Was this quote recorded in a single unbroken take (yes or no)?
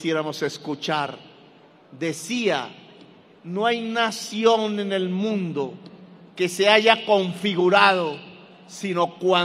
yes